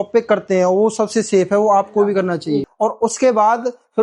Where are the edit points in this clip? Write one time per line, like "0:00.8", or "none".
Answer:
0:02.7